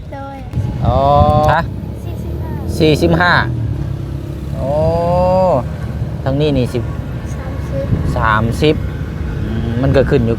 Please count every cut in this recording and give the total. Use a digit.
1